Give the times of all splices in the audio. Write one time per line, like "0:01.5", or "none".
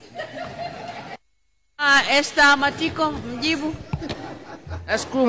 none